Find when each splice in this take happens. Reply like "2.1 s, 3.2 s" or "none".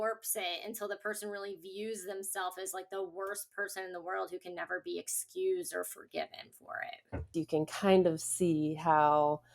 7.3 s